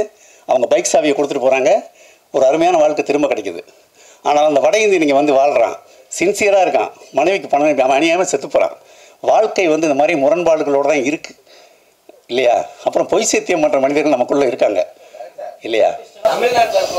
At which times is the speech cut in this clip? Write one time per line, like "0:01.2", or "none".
none